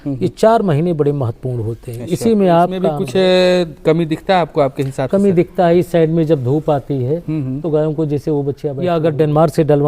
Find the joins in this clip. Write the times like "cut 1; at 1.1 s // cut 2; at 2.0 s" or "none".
cut 1; at 2.9 s // cut 2; at 8.8 s

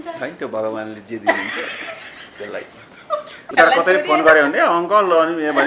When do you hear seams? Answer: cut 1; at 3.5 s

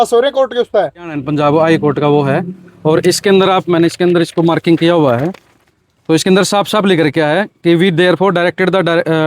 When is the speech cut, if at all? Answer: cut 1; at 1.2 s

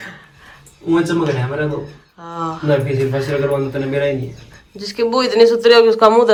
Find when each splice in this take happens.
none

